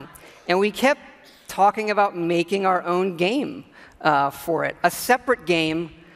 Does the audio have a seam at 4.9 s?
no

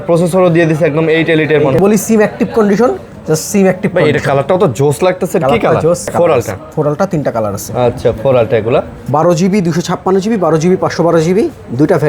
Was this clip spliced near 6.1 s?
yes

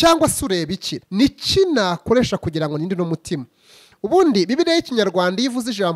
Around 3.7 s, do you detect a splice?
no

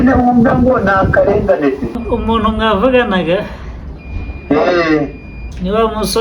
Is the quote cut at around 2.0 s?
yes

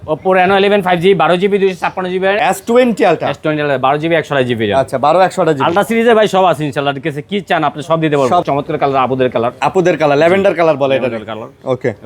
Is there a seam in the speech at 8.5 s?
yes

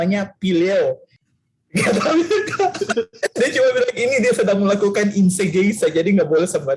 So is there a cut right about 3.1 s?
no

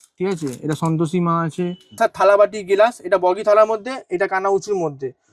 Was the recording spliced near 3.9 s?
no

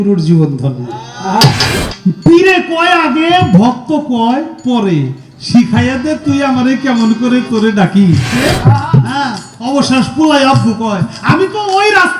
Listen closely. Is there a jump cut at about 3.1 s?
no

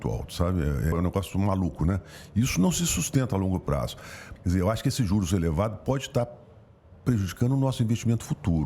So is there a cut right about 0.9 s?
yes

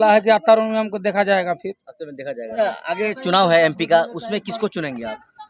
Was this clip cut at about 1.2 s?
no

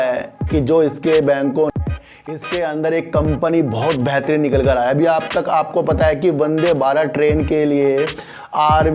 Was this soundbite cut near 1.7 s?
yes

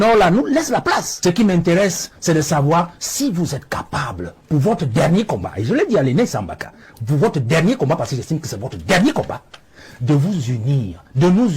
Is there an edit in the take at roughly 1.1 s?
yes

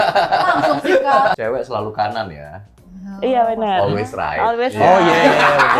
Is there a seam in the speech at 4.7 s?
no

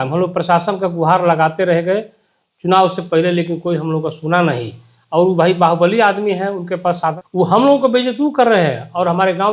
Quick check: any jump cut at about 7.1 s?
yes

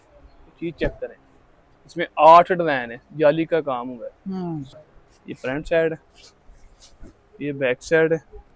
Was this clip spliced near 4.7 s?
yes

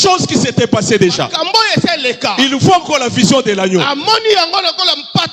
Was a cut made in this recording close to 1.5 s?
no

